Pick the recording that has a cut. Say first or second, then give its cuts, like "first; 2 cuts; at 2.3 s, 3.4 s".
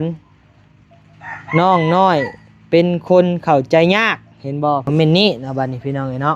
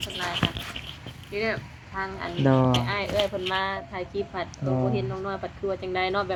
first; 1 cut; at 4.8 s